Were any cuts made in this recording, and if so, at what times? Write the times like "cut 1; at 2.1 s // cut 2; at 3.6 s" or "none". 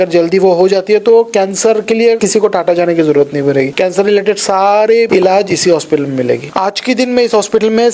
cut 1; at 2.2 s // cut 2; at 3.7 s // cut 3; at 5.1 s // cut 4; at 6.5 s